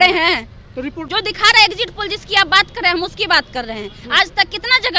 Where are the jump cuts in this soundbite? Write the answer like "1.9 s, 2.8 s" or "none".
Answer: 1.1 s